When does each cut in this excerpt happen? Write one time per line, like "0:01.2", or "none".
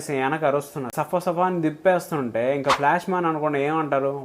0:00.9